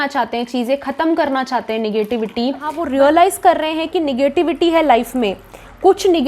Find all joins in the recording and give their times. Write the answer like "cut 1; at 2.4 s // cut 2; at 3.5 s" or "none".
cut 1; at 2.8 s